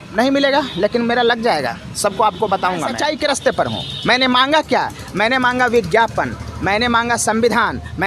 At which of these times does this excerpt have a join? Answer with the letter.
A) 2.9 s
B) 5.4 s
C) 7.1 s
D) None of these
A